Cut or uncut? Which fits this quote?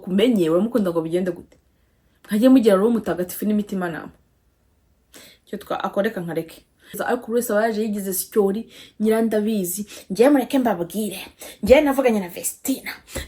cut